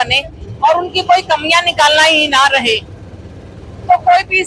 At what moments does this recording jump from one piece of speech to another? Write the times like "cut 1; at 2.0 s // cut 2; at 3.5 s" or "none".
none